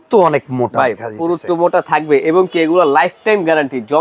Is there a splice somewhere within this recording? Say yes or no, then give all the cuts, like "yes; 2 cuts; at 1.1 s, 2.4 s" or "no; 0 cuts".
no; 0 cuts